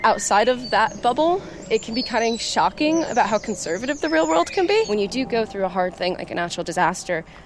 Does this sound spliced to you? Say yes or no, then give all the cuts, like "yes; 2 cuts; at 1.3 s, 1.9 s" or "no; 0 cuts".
yes; 1 cut; at 4.9 s